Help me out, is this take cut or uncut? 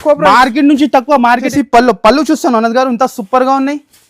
cut